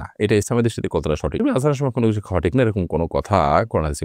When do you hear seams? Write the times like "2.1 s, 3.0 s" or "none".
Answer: none